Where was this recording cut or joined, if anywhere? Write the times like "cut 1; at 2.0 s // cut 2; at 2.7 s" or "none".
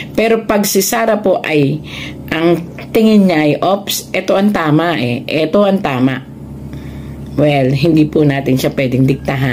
none